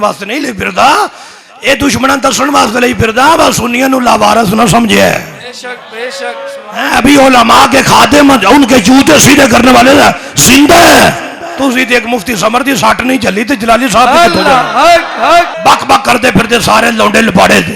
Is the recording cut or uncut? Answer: cut